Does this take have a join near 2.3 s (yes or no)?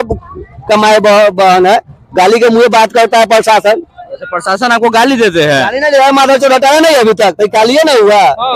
no